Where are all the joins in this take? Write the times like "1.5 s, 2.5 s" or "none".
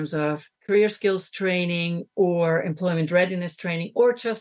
none